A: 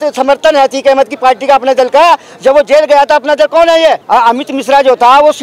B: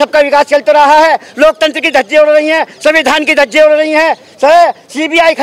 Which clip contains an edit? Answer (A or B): A